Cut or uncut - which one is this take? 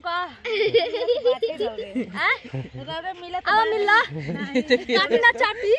uncut